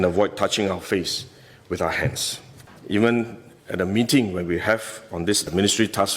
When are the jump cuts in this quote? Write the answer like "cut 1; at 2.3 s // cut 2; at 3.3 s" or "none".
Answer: cut 1; at 2.7 s